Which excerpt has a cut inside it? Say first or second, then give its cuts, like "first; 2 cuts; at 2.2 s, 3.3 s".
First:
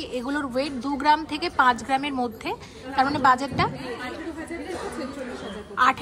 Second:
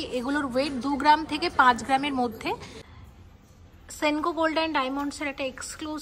second; 1 cut; at 2.7 s